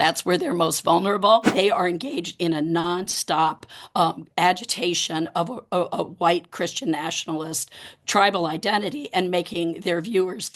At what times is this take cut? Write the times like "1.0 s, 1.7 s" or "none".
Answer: 1.5 s